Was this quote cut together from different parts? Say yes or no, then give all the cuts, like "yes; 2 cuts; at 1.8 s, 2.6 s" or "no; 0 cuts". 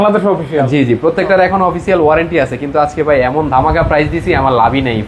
no; 0 cuts